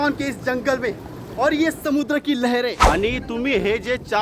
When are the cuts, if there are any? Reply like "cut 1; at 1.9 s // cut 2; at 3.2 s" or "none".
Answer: cut 1; at 2.8 s